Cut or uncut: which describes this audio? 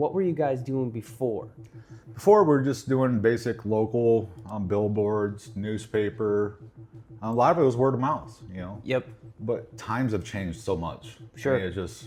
uncut